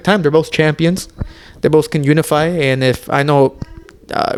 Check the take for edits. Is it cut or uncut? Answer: uncut